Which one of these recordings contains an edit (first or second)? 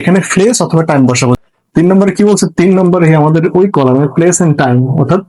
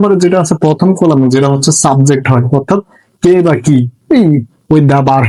first